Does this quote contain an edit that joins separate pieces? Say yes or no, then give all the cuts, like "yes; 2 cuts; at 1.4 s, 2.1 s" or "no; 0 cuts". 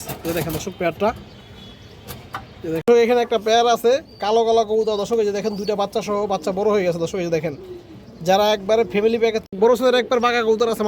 yes; 2 cuts; at 2.9 s, 9.4 s